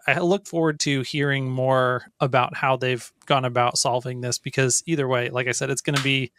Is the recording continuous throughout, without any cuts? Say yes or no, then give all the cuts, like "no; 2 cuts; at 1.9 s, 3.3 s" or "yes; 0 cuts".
no; 1 cut; at 2.1 s